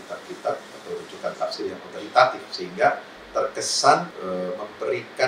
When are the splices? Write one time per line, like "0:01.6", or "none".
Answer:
0:04.1